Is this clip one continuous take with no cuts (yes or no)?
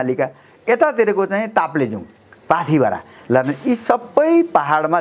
yes